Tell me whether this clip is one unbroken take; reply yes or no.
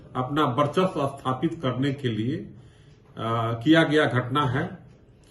yes